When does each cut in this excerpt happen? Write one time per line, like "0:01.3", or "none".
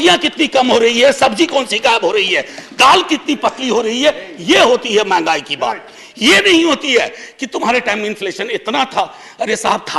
none